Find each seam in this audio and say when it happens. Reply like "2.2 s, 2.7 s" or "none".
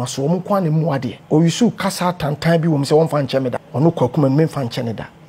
1.1 s, 3.6 s